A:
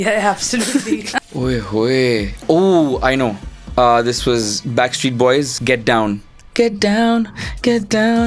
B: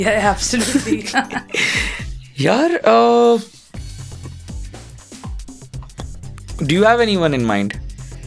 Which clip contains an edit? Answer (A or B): A